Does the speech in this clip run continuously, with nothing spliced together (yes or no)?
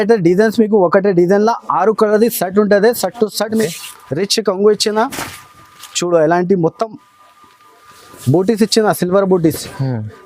no